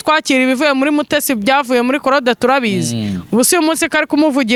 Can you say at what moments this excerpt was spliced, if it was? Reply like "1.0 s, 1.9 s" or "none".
none